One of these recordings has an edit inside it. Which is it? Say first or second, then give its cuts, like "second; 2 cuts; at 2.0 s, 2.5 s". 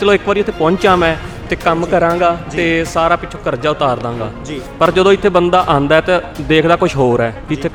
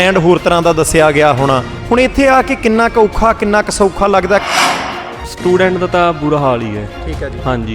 second; 2 cuts; at 1.7 s, 4.8 s